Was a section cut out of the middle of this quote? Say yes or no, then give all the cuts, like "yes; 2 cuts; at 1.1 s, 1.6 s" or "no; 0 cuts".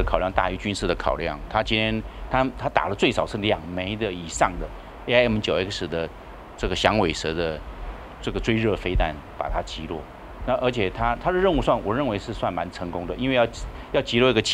no; 0 cuts